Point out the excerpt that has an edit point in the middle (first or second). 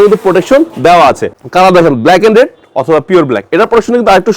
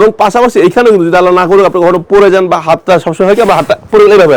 first